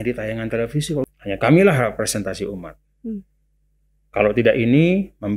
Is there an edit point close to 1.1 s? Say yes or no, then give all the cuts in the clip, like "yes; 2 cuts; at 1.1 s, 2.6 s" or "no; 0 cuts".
yes; 1 cut; at 1.1 s